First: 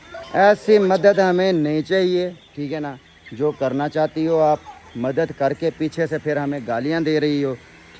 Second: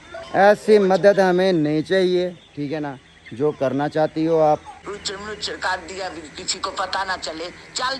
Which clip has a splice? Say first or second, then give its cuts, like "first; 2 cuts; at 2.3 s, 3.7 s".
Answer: second; 1 cut; at 4.8 s